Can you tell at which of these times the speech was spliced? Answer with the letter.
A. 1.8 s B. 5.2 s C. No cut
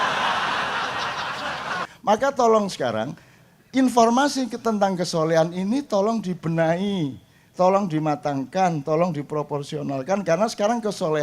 A